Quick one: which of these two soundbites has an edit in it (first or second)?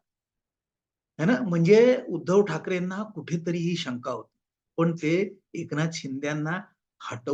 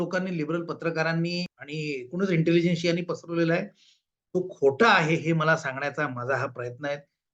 second